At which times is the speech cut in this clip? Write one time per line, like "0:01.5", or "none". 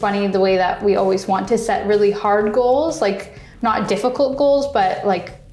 none